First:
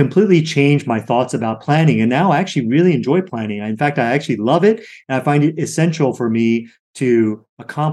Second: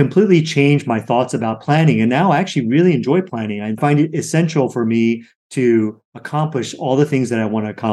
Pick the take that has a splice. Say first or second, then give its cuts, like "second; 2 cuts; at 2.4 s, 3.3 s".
second; 1 cut; at 3.8 s